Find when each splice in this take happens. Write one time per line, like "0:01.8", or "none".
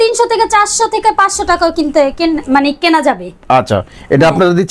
none